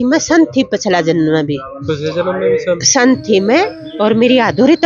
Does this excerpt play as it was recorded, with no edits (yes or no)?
yes